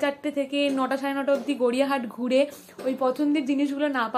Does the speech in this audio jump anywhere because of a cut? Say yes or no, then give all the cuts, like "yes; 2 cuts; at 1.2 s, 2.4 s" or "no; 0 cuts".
no; 0 cuts